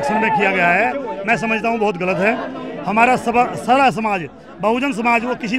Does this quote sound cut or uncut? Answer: uncut